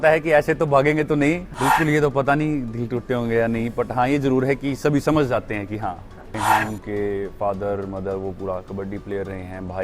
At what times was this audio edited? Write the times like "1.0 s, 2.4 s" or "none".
1.4 s, 6.4 s